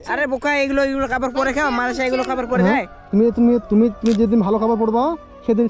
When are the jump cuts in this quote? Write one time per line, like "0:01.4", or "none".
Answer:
0:03.6

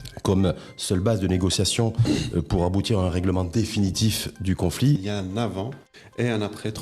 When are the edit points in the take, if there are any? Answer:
0:05.0

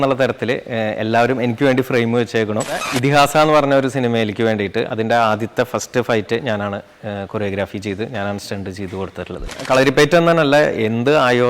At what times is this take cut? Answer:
0:02.9
0:09.6

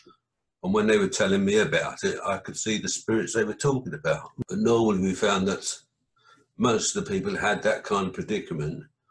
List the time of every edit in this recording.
0:04.3

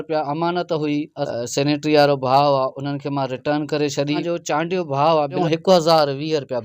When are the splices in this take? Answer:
0:01.2
0:04.2
0:05.4

